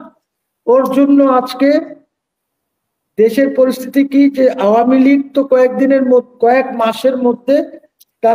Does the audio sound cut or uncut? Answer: uncut